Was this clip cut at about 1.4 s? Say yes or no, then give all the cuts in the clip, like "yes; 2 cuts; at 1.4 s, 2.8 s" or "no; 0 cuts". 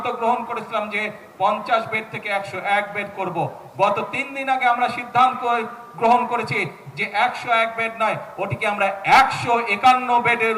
no; 0 cuts